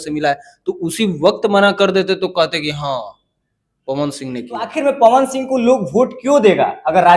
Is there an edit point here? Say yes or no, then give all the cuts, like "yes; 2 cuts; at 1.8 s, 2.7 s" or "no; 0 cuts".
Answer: yes; 1 cut; at 4.7 s